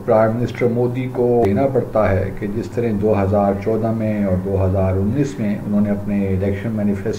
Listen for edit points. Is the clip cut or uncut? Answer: cut